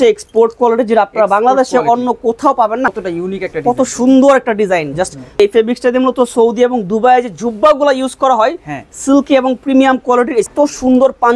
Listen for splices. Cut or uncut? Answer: cut